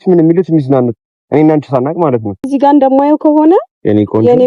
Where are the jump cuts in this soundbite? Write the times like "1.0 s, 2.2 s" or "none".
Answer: 2.5 s